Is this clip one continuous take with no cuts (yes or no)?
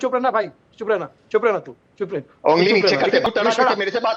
no